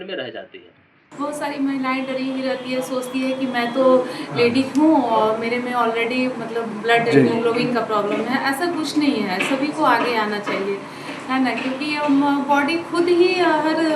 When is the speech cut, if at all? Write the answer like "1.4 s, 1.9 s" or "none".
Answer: 1.0 s